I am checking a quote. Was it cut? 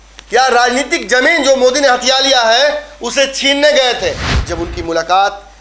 yes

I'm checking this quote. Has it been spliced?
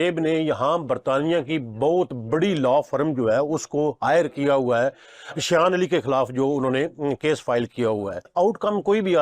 yes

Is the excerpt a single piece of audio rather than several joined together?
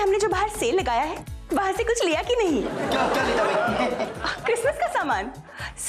yes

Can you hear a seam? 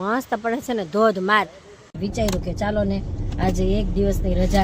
yes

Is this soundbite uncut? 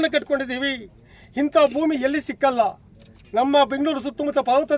yes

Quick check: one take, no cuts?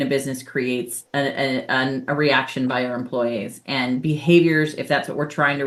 yes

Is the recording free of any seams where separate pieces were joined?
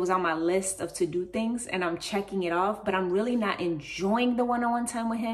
yes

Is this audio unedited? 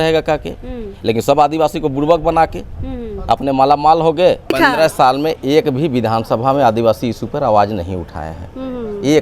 no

